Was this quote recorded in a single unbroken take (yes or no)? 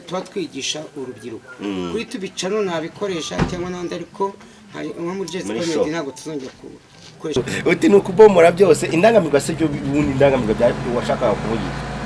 no